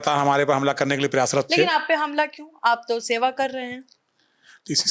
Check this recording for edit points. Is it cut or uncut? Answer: uncut